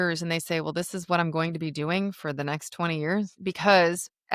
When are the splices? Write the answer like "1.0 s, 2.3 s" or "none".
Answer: 3.3 s